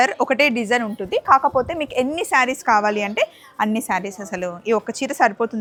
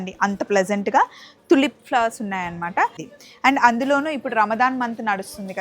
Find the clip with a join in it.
second; 1 cut; at 3.0 s

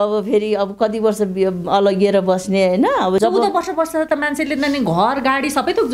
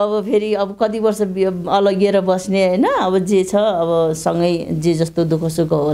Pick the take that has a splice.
first; 1 cut; at 3.2 s

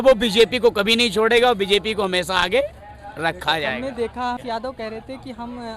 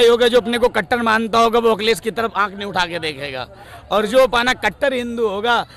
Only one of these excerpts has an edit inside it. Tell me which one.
first; 1 cut; at 4.4 s

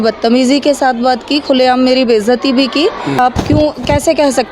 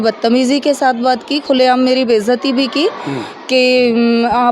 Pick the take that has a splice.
first; 1 cut; at 3.2 s

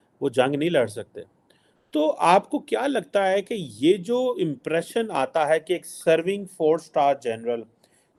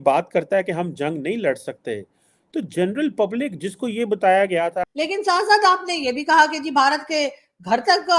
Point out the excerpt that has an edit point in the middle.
second; 1 cut; at 4.9 s

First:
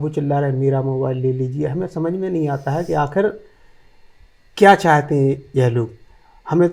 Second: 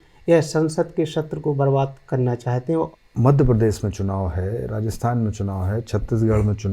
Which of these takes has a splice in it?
second; 1 cut; at 2.9 s

